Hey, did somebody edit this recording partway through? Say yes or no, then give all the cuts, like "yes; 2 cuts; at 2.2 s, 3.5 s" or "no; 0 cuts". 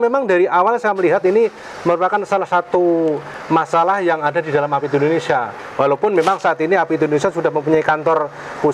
no; 0 cuts